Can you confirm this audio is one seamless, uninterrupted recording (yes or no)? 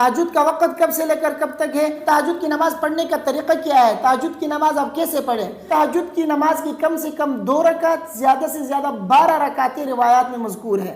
no